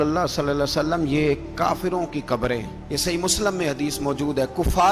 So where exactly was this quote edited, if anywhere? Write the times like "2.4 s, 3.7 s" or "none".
none